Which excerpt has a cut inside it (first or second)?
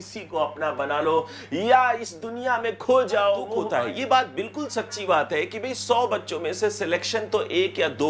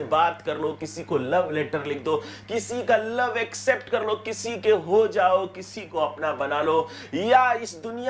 first